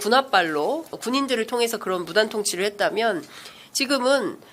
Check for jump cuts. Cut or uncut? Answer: cut